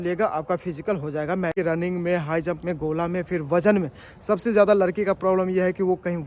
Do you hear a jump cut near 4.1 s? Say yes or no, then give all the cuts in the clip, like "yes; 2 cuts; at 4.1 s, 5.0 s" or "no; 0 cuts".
no; 1 cut; at 1.5 s